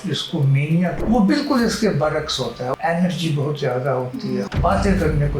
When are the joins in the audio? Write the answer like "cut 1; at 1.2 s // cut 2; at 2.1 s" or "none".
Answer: cut 1; at 1.0 s // cut 2; at 2.7 s // cut 3; at 4.5 s